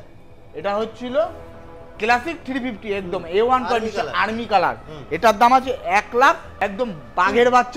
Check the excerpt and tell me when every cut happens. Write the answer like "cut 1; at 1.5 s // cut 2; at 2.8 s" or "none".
cut 1; at 6.5 s